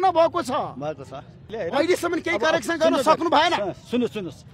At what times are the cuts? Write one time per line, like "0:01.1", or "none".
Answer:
0:01.5

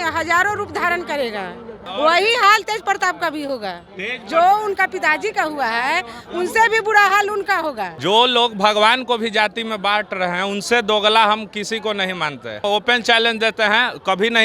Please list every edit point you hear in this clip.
0:01.8
0:07.9
0:12.6

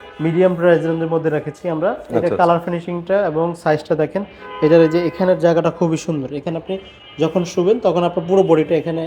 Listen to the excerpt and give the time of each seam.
none

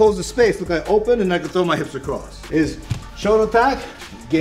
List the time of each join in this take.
0:02.3

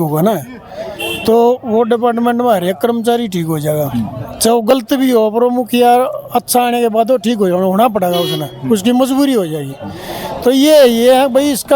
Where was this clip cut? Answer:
none

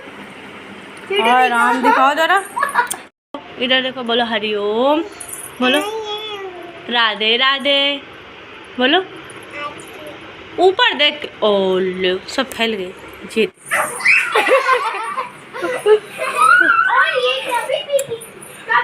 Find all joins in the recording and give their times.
0:03.0
0:13.6

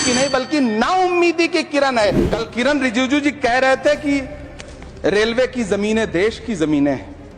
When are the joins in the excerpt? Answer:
0:02.2

